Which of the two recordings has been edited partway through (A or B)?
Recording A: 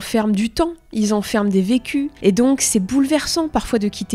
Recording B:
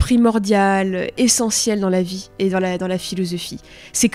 A